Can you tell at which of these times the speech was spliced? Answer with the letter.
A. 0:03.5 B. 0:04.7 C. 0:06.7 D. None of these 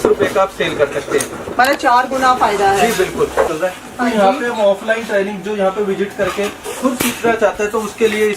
A